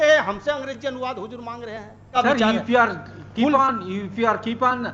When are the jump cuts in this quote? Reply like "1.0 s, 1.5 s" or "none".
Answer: 2.2 s